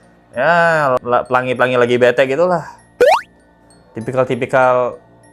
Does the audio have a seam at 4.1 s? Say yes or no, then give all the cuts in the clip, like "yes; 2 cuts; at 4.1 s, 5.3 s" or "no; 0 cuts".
no; 0 cuts